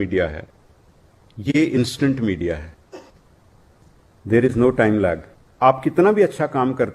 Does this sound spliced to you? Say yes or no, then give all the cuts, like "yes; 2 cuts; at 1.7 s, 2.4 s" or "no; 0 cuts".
yes; 1 cut; at 5.4 s